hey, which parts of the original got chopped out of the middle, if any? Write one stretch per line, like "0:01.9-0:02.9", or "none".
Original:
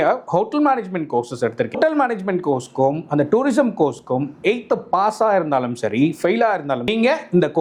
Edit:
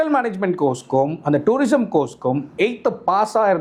none